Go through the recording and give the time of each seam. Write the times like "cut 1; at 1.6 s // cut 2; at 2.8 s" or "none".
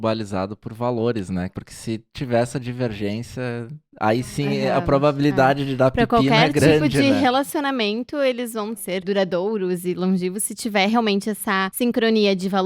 cut 1; at 1.5 s // cut 2; at 8.8 s // cut 3; at 11.7 s